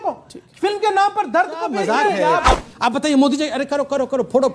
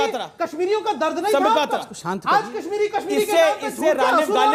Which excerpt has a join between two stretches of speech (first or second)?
first